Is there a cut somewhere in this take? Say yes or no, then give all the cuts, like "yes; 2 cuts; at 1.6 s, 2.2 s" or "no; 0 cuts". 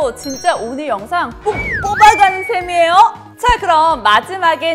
no; 0 cuts